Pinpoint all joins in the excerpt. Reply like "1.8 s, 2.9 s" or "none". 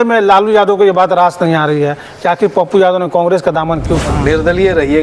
4.1 s